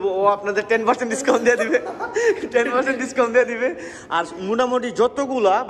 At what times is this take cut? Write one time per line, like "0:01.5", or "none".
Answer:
none

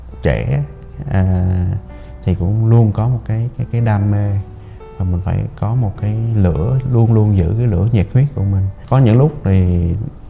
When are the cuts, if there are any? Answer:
0:08.7

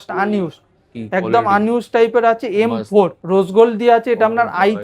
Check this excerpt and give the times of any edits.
0:03.2

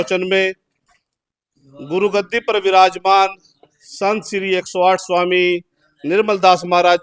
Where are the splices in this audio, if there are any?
none

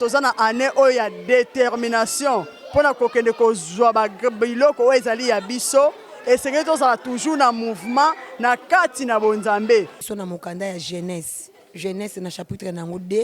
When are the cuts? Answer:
0:10.0

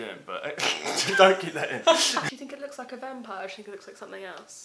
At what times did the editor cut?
0:02.3

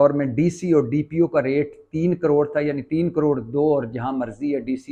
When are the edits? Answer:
none

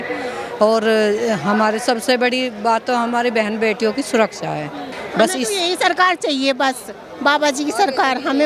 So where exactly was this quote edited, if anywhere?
0:05.0

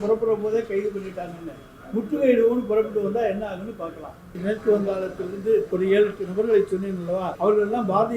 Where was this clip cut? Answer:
0:04.4
0:05.7
0:07.3

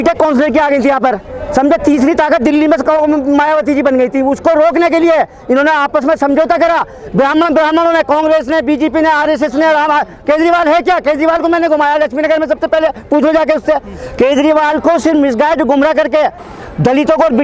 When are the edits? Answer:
none

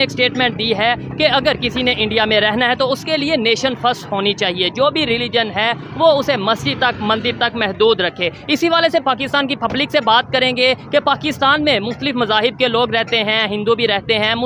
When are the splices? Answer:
none

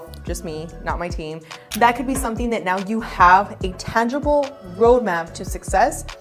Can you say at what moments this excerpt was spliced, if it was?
0:01.7

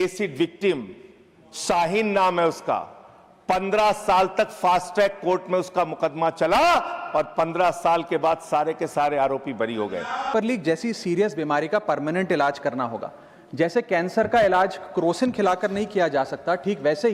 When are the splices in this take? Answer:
0:10.3

